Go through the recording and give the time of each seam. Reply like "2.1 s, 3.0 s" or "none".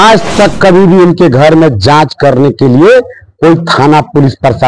none